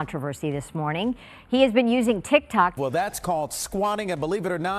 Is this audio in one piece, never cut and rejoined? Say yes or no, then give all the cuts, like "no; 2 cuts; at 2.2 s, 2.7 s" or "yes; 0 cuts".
no; 1 cut; at 2.7 s